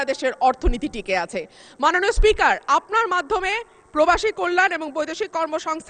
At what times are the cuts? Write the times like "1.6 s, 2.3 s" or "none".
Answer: none